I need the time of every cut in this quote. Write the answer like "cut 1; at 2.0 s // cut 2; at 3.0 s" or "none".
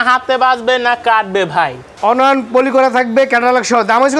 cut 1; at 1.9 s